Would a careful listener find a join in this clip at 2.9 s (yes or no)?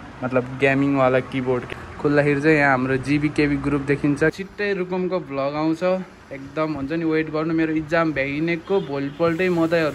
no